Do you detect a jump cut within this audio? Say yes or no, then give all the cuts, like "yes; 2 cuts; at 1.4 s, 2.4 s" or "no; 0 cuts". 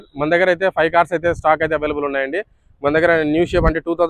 no; 0 cuts